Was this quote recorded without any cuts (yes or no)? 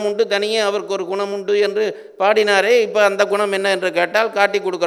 yes